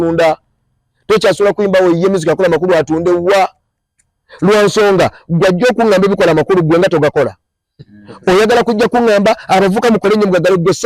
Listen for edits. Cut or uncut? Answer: uncut